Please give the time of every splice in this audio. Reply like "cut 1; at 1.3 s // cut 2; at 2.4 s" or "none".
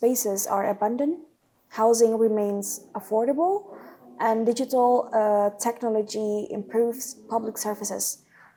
none